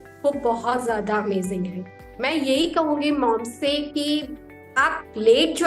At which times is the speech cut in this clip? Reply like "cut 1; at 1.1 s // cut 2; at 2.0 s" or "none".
cut 1; at 1.7 s